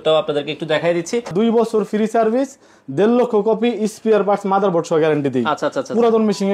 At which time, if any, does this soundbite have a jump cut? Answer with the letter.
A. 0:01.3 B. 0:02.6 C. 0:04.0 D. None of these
A